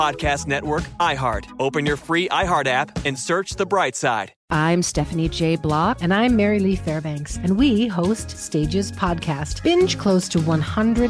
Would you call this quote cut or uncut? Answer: cut